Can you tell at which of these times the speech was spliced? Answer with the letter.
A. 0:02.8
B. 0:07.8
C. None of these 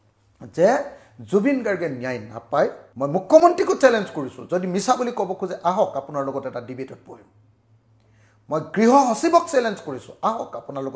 A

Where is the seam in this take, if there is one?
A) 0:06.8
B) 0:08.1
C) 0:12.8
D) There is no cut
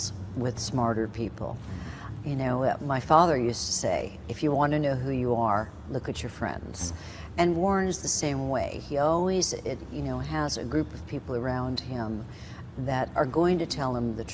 D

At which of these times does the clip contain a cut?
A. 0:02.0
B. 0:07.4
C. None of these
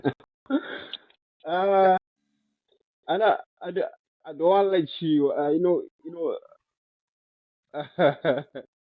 A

